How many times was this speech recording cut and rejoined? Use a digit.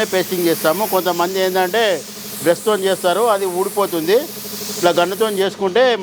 0